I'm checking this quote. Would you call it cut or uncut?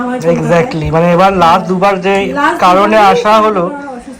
uncut